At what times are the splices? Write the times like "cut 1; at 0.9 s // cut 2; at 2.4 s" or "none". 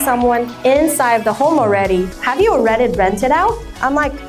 cut 1; at 2.1 s